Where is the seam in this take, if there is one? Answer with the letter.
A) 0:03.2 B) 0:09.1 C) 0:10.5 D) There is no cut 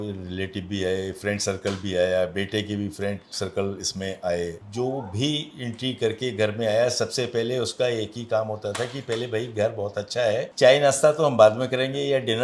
D